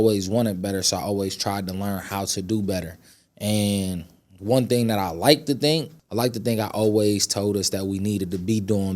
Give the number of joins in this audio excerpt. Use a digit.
1